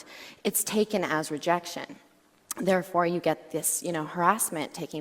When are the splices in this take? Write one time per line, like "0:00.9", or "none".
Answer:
none